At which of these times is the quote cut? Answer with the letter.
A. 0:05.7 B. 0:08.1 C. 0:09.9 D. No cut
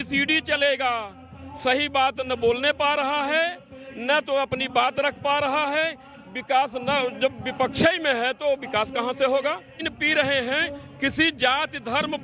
C